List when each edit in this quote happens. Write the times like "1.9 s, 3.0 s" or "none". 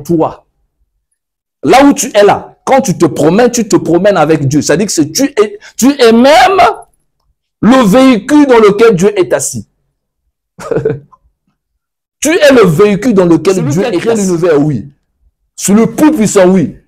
14.0 s

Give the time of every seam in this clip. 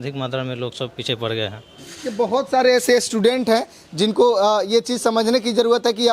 none

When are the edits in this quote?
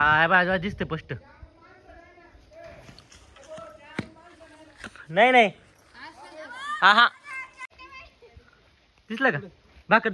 7.7 s

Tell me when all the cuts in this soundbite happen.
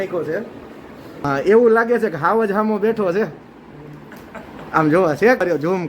1.2 s

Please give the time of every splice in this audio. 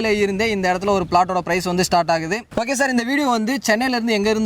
none

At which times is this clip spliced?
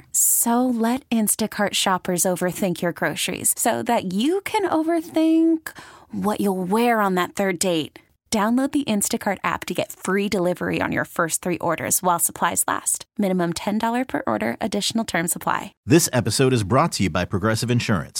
15.7 s

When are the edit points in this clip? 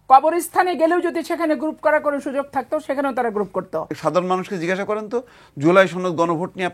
3.9 s

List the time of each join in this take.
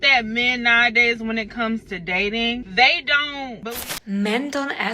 3.5 s

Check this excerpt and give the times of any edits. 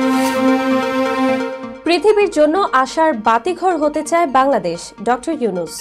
1.6 s

